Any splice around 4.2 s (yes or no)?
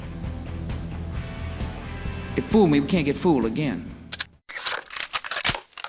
yes